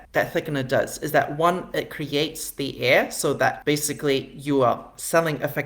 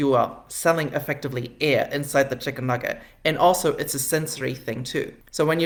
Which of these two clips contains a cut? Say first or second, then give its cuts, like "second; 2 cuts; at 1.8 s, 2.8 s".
first; 1 cut; at 3.6 s